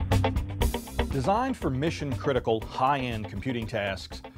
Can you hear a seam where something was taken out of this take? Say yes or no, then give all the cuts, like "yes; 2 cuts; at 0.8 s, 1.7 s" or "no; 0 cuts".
yes; 1 cut; at 1.1 s